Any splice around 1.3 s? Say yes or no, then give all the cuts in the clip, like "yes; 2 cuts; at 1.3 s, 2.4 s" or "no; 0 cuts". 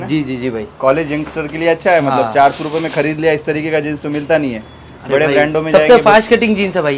no; 0 cuts